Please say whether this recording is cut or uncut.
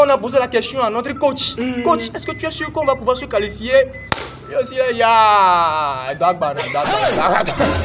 uncut